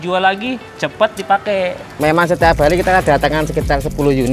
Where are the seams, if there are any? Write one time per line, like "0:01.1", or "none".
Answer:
0:01.9